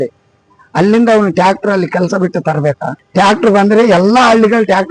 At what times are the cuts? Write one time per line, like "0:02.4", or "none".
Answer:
0:03.0